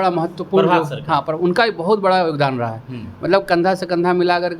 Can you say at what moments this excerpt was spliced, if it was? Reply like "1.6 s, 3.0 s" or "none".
none